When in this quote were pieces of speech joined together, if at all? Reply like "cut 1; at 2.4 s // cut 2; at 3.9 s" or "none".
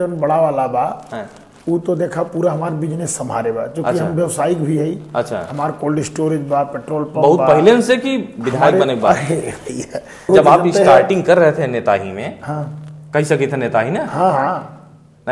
cut 1; at 10.3 s

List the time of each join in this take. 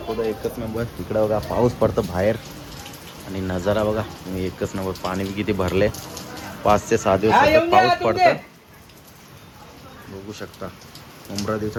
none

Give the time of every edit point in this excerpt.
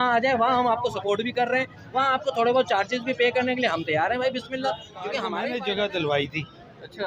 cut 1; at 5.3 s

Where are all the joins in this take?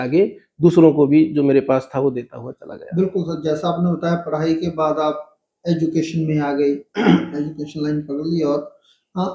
none

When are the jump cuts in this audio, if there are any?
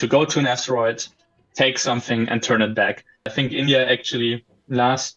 cut 1; at 3.3 s

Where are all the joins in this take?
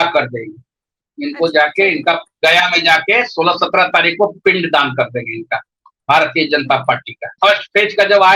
cut 1; at 7.3 s

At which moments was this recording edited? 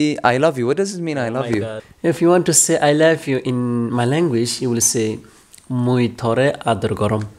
cut 1; at 1.8 s

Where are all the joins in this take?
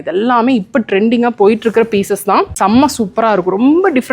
cut 1; at 2.5 s

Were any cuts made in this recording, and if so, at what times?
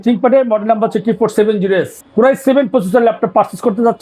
cut 1; at 2.0 s

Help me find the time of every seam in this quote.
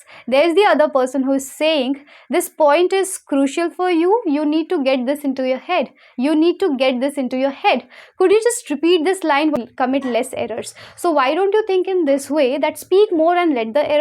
cut 1; at 9.6 s

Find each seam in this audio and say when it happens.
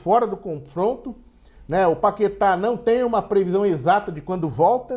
none

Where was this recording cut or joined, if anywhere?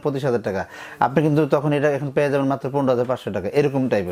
none

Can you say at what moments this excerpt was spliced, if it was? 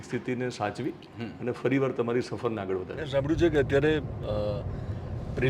cut 1; at 3.0 s

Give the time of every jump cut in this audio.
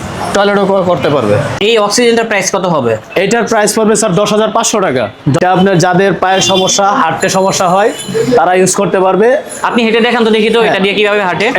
cut 1; at 1.5 s // cut 2; at 5.4 s

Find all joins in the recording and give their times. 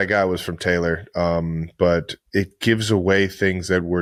none

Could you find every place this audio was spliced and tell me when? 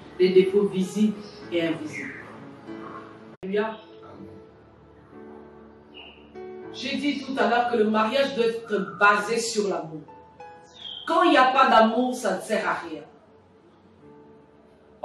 cut 1; at 3.4 s

